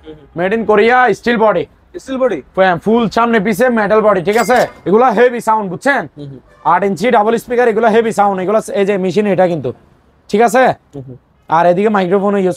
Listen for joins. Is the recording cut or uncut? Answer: cut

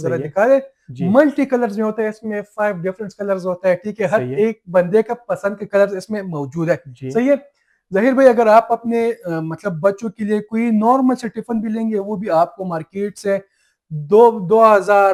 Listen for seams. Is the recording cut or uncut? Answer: uncut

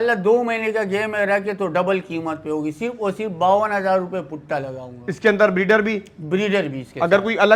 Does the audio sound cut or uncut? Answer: uncut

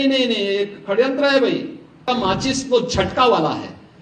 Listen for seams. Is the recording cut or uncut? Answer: cut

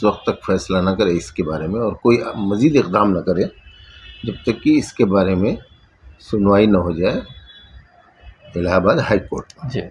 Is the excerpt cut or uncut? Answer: uncut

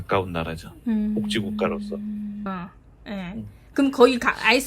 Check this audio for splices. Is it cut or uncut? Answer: cut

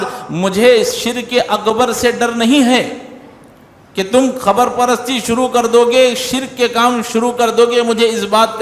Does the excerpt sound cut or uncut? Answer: uncut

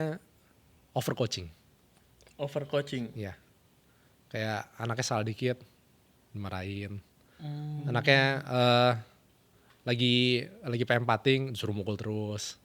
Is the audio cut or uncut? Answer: uncut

